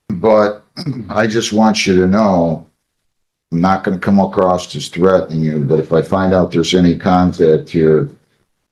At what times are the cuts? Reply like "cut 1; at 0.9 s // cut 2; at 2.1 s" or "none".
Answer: none